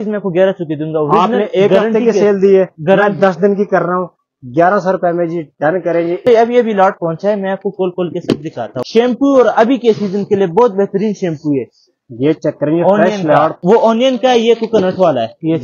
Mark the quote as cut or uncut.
cut